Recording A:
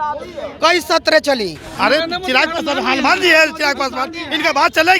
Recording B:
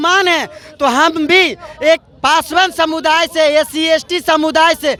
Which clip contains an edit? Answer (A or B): A